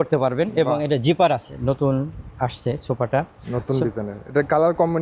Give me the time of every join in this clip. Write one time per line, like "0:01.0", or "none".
0:01.5